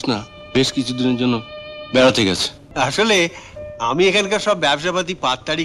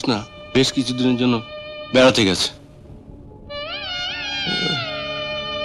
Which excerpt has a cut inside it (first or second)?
first